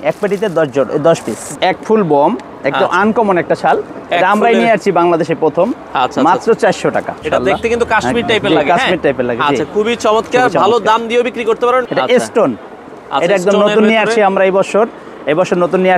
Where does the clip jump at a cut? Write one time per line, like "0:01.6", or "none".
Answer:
0:01.4
0:07.2
0:11.8